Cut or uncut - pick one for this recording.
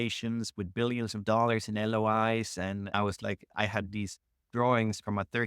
cut